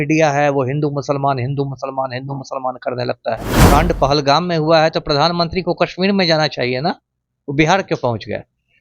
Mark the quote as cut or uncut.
cut